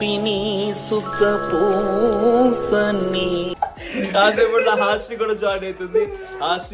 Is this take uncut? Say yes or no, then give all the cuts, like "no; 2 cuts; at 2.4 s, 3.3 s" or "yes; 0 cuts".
yes; 0 cuts